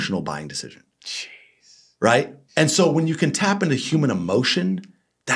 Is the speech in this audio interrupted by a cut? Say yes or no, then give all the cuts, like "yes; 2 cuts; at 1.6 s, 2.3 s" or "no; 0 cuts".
yes; 1 cut; at 2.4 s